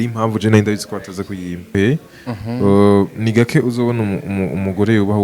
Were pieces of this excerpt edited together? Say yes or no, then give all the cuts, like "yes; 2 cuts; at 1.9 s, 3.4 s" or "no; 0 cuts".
yes; 1 cut; at 1.8 s